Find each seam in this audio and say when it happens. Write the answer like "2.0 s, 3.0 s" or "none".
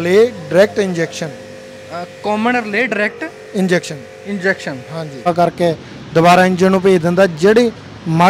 5.3 s